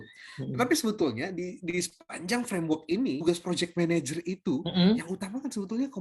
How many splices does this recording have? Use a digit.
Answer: 1